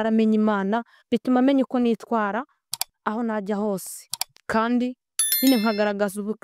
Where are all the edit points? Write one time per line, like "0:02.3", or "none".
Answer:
none